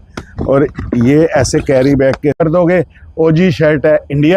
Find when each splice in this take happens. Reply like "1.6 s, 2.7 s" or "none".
2.4 s